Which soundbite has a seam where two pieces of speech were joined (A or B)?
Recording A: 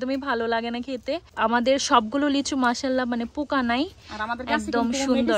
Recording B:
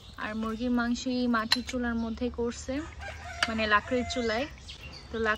A